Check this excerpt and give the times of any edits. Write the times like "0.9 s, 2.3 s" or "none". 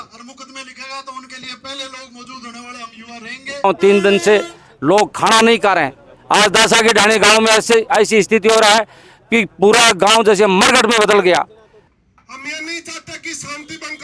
3.6 s, 11.7 s